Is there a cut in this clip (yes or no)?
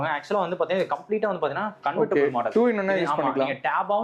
no